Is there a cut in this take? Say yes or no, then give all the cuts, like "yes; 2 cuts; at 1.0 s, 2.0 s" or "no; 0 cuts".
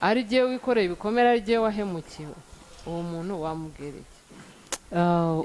no; 0 cuts